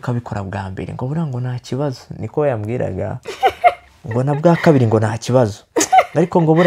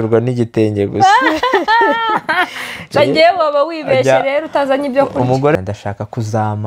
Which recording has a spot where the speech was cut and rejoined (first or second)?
second